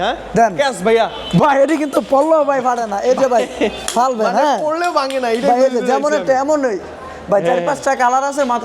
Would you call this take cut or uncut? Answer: uncut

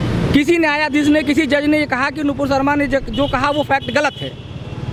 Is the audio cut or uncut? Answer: uncut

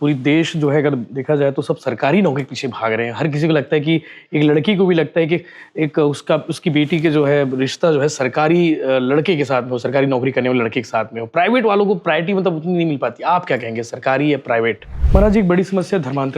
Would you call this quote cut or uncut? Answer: cut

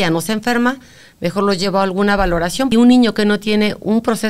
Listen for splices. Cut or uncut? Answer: cut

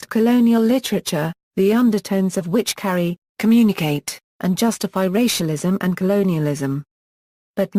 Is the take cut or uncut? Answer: uncut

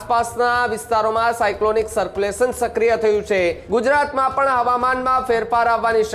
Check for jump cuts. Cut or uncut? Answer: cut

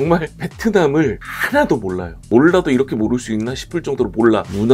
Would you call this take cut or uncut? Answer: cut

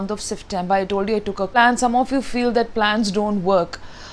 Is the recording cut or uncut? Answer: cut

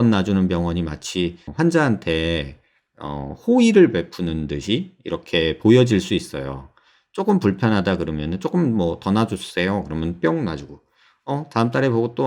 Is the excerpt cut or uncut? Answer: cut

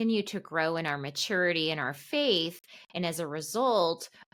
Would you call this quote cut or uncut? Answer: uncut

